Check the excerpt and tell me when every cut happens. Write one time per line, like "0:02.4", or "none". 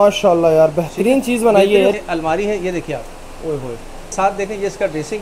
0:01.9
0:04.1